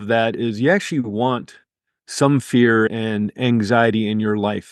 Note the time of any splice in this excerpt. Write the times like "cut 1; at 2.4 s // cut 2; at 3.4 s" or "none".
cut 1; at 2.9 s